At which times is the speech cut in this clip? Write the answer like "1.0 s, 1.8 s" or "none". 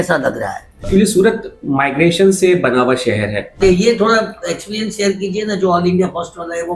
0.8 s, 3.6 s